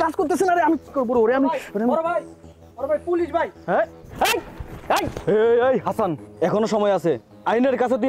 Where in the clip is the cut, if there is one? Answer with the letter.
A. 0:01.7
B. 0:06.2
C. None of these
B